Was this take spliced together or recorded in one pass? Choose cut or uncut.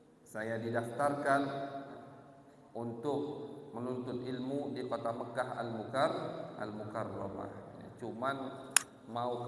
uncut